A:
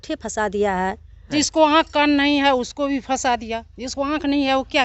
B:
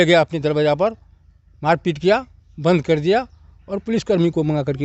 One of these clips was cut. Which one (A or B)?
A